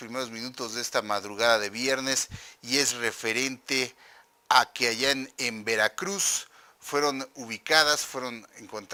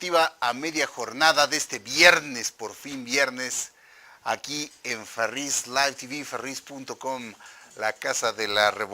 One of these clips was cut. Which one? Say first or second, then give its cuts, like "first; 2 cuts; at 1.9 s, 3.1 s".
second; 1 cut; at 7.0 s